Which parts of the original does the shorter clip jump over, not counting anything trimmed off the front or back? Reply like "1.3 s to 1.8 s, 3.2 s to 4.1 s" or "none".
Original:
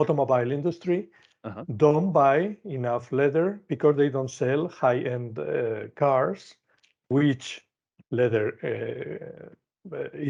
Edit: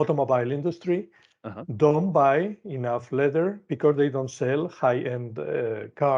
none